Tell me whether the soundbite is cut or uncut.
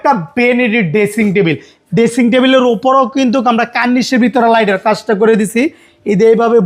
uncut